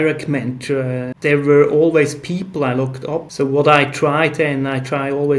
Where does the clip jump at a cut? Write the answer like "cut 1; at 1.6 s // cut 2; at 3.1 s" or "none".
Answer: cut 1; at 3.3 s